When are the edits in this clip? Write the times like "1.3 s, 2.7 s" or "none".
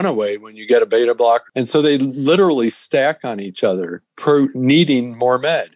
1.5 s, 4.1 s